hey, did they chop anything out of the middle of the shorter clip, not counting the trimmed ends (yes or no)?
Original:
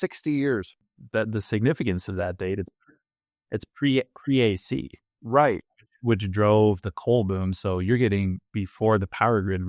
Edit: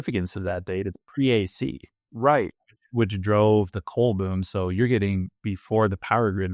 yes